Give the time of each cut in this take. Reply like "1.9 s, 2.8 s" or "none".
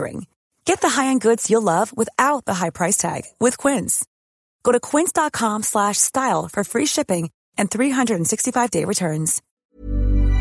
9.4 s